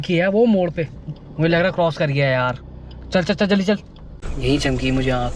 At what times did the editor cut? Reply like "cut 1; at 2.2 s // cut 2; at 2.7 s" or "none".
cut 1; at 4.3 s